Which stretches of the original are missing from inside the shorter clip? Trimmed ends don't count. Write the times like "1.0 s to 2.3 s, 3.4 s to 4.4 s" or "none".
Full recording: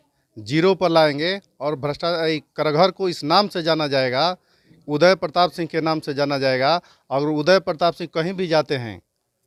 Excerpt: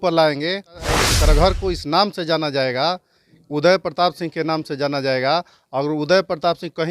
1.7 s to 2.3 s

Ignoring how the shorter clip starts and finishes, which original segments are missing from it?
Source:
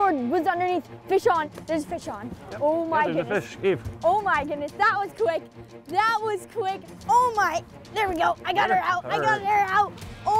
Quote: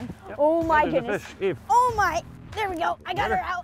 3.8 s to 7.0 s

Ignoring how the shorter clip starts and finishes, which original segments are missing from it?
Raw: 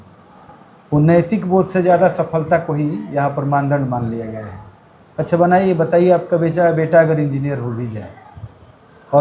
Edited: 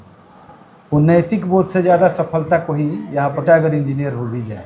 3.4 s to 6.9 s

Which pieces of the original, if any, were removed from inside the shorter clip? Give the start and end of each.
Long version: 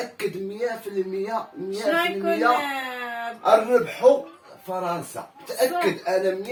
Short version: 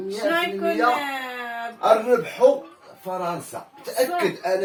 none

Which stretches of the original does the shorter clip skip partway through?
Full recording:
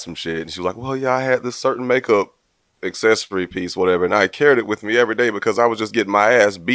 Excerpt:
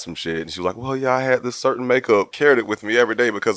2.3 s to 4.3 s

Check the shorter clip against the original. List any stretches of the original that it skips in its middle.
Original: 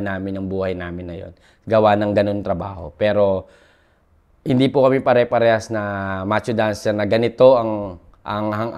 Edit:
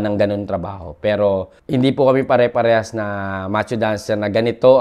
3.5 s to 4.3 s

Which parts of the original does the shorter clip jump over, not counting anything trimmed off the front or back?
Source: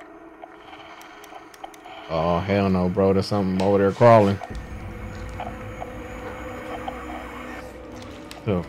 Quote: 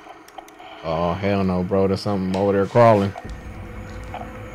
none

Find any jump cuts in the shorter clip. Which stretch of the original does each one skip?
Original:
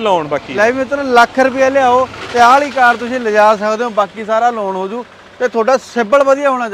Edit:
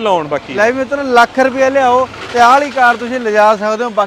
none

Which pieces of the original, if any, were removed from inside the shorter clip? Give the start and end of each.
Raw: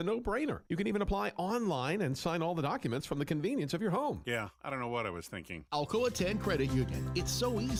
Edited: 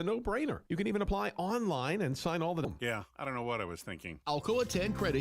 2.7 s to 4.1 s

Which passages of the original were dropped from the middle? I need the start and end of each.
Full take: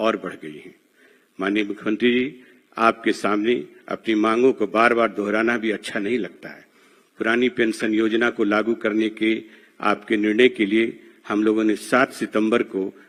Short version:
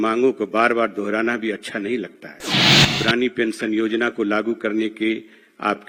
none

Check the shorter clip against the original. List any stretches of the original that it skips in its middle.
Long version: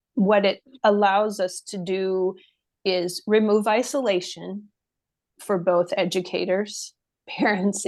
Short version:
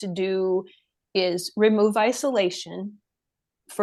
none

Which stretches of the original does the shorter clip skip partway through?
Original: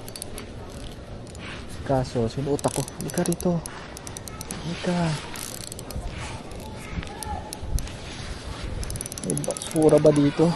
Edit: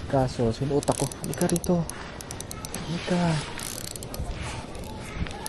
none

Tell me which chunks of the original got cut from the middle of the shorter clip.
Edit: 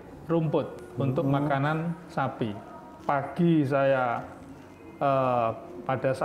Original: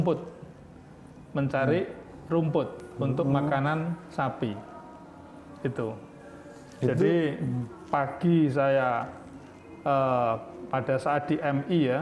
4.9 s to 7.7 s

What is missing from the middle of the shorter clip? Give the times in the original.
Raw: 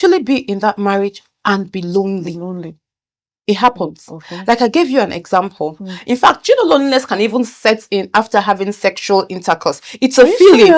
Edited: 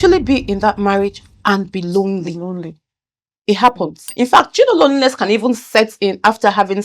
4.0 s to 5.9 s

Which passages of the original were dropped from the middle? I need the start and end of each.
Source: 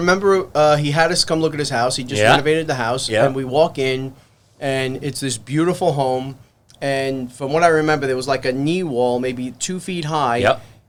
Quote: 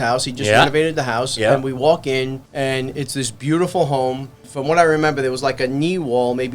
4.1 s to 4.5 s, 6.5 s to 7.3 s

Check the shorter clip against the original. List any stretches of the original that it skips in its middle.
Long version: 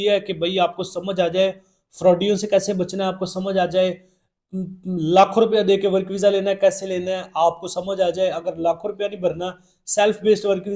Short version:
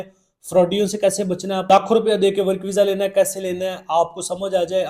3.2 s to 5.1 s

